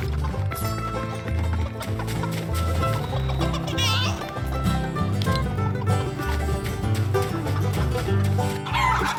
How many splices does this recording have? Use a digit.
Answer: 0